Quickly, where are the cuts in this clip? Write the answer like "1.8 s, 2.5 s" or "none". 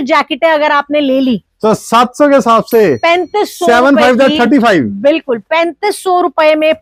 none